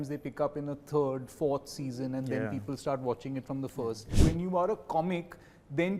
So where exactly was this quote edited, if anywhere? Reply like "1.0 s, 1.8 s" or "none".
4.1 s